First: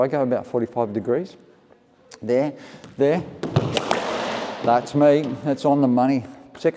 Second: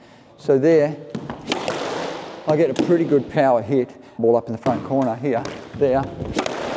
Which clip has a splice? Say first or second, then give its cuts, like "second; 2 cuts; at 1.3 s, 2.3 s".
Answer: second; 1 cut; at 4.1 s